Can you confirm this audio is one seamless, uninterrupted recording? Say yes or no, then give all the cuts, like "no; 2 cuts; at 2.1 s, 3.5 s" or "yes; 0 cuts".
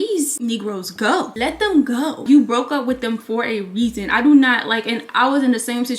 yes; 0 cuts